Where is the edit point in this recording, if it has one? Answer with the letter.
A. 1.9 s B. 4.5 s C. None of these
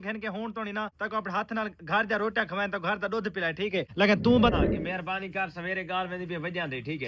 B